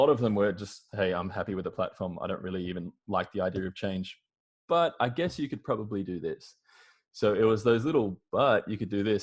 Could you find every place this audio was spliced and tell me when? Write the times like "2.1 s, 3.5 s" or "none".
none